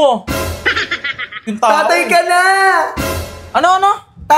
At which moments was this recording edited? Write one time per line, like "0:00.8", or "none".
0:01.5